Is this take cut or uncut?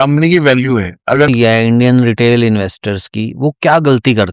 cut